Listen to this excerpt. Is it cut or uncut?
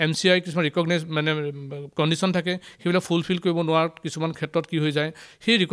uncut